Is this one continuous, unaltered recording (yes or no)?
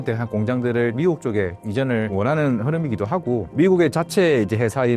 no